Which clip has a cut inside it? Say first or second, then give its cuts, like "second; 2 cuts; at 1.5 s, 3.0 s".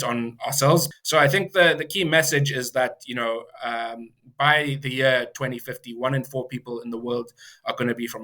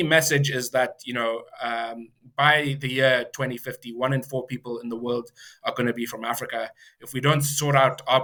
first; 1 cut; at 0.9 s